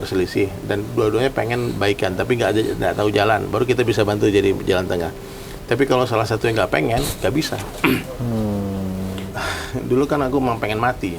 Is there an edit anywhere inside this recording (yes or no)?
yes